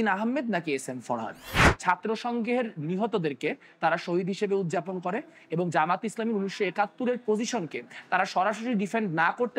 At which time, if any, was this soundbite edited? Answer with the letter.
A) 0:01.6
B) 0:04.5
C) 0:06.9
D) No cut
A